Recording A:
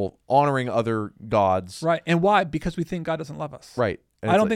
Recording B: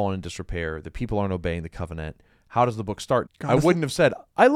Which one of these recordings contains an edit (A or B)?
B